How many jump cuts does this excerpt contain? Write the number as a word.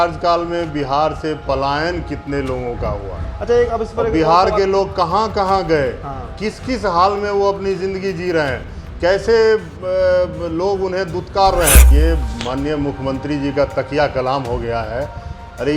one